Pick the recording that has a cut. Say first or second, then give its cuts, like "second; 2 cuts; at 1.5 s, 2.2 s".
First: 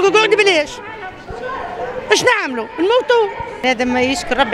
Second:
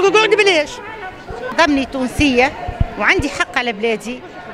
second; 1 cut; at 1.5 s